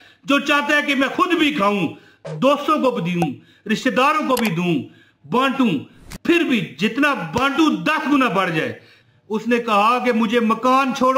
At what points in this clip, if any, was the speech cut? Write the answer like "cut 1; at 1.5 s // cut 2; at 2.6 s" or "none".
cut 1; at 8.9 s